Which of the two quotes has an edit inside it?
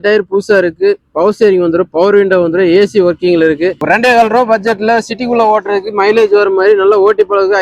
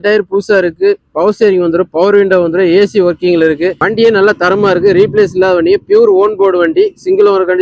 first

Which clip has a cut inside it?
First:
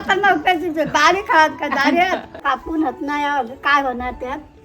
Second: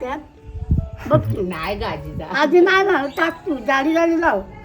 first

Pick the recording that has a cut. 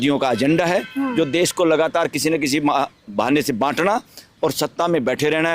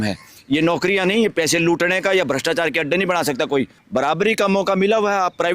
second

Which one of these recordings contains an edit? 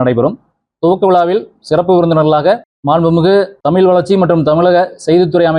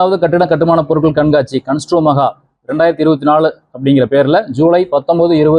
first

